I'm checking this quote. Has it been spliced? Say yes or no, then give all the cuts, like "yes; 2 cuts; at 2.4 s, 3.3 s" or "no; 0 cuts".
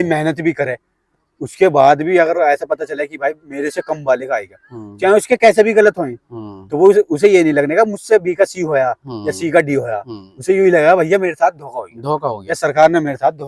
no; 0 cuts